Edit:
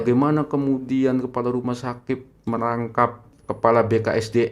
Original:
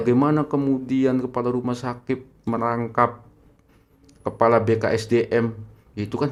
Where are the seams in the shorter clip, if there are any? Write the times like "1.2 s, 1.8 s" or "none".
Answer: 3.3 s